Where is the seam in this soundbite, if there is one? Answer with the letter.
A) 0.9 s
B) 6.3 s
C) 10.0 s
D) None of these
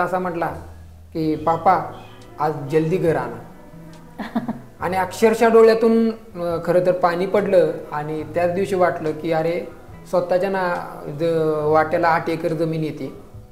D